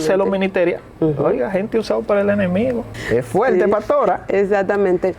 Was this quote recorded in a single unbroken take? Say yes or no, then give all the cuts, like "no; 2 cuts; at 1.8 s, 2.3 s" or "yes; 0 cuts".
no; 1 cut; at 2.9 s